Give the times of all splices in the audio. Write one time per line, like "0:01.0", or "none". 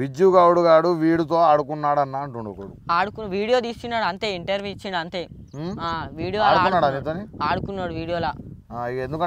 none